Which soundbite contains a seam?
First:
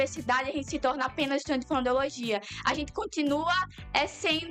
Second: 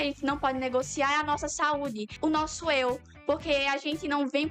second; 1 cut; at 2.1 s

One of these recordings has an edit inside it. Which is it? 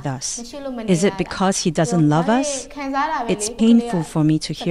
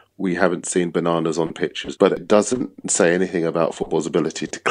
second; 1 cut; at 2.2 s

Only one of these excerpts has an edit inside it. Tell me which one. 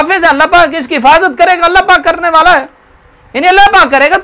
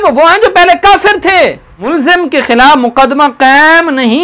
second; 1 cut; at 1.7 s

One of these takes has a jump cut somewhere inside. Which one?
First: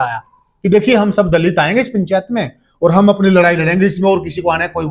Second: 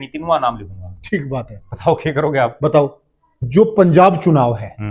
second; 1 cut; at 3.3 s

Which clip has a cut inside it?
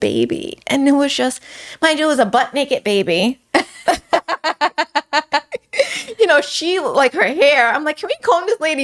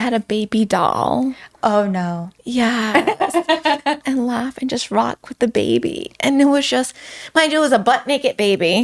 second; 1 cut; at 4.0 s

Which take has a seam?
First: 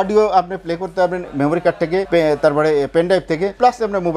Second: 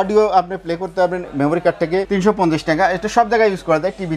second; 1 cut; at 2.1 s

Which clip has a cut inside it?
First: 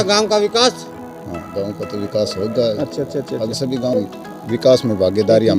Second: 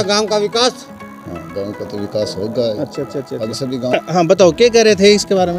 first; 1 cut; at 3.9 s

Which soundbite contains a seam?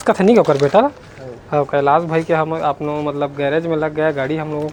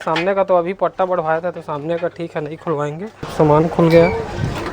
second; 1 cut; at 3.3 s

